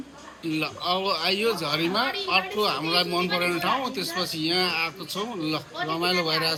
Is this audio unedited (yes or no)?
yes